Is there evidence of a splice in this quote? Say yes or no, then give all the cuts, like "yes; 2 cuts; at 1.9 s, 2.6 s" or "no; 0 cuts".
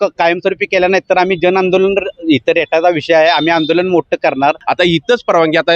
yes; 1 cut; at 4.6 s